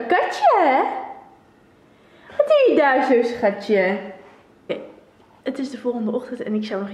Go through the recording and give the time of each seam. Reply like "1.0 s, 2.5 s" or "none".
4.7 s